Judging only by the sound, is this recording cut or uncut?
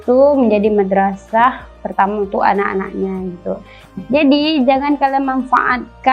cut